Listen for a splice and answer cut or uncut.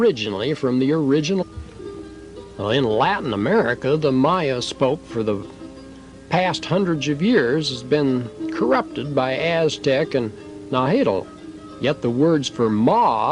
uncut